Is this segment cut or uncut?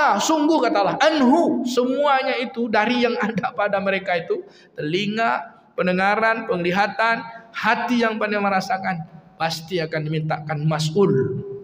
uncut